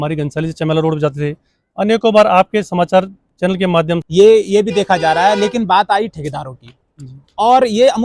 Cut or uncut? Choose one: cut